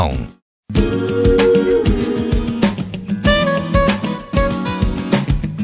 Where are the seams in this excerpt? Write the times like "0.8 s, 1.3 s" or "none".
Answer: 0.9 s